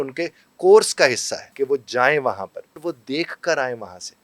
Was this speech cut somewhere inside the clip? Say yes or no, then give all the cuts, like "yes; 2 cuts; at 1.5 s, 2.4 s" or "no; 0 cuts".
yes; 2 cuts; at 1.4 s, 2.8 s